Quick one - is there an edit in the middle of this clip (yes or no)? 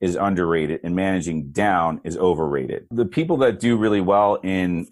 yes